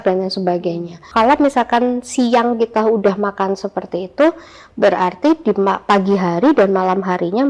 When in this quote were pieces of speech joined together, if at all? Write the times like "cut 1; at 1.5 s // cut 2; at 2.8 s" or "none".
cut 1; at 1.1 s